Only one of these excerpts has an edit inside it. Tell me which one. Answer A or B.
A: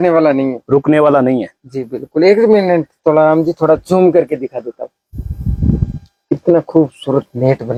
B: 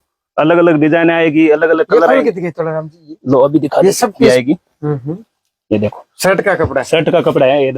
B